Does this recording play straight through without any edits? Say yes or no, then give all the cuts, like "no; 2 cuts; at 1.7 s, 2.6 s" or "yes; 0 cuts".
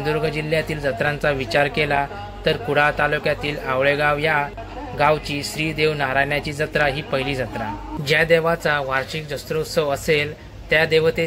no; 1 cut; at 7.9 s